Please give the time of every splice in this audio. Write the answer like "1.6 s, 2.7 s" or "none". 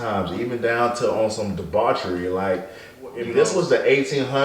3.2 s